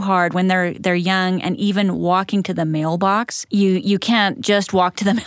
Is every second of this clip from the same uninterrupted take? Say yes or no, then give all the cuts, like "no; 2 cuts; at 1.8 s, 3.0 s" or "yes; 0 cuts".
no; 1 cut; at 3.4 s